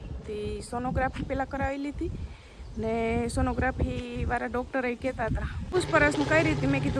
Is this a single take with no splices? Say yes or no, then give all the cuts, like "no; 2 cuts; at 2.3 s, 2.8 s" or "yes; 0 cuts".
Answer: no; 1 cut; at 5.7 s